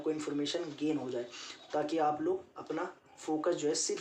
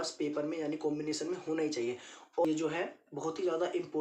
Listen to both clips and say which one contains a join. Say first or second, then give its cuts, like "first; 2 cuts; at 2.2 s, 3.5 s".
second; 1 cut; at 2.4 s